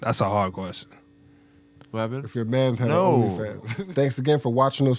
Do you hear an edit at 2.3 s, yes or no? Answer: no